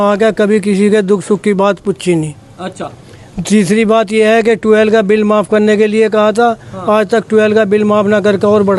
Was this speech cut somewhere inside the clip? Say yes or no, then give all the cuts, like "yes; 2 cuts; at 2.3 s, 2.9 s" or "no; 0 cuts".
no; 0 cuts